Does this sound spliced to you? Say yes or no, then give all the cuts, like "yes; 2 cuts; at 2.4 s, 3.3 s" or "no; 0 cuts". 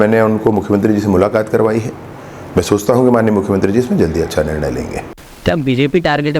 yes; 1 cut; at 5.2 s